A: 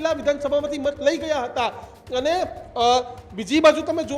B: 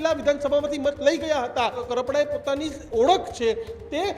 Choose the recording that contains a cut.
B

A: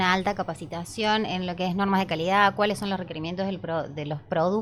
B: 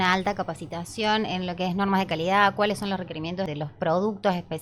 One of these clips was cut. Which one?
B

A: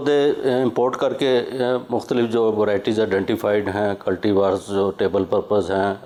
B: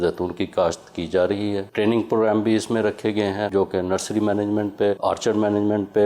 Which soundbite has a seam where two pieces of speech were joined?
B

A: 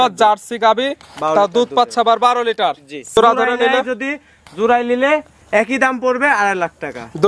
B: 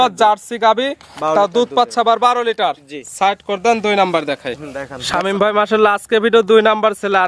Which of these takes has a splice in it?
A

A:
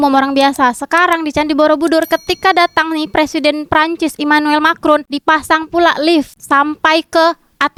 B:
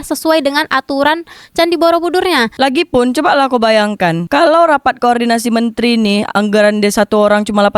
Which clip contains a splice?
B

